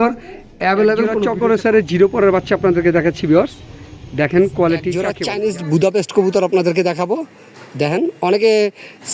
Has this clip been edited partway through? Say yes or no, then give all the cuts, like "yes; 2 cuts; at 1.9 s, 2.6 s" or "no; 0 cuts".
yes; 2 cuts; at 1.0 s, 4.9 s